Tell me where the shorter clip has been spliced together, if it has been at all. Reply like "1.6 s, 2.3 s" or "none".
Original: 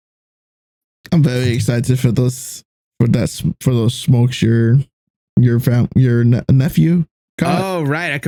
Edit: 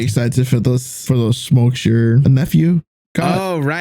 1.0 s, 2.2 s